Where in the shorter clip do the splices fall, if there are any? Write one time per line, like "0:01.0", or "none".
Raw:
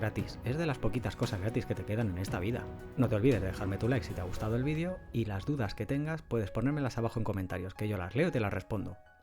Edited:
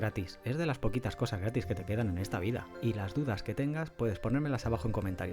0:02.7